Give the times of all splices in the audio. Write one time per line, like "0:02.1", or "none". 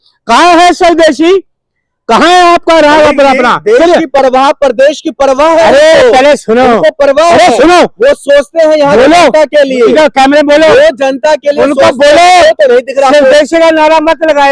none